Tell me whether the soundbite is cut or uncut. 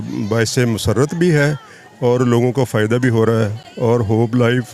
uncut